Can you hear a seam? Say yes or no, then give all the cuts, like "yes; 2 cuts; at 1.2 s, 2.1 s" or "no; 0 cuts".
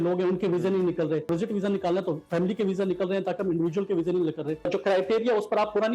yes; 2 cuts; at 1.3 s, 4.7 s